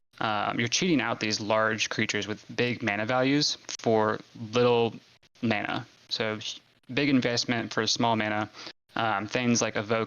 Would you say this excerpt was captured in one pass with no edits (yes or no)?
no